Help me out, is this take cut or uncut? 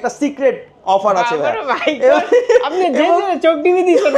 uncut